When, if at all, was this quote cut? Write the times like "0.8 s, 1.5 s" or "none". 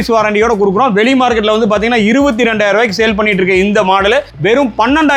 none